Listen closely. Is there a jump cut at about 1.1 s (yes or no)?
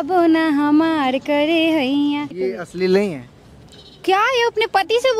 no